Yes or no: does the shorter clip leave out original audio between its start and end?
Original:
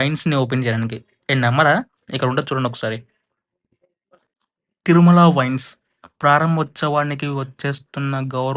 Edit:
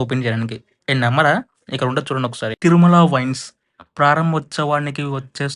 yes